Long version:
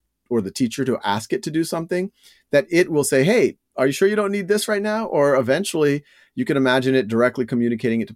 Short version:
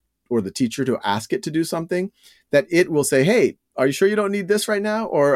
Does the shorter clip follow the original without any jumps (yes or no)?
yes